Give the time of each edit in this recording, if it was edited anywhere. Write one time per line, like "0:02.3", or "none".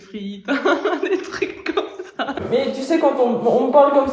0:02.4